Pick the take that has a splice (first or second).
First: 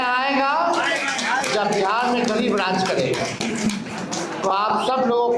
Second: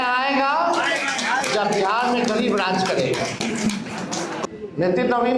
second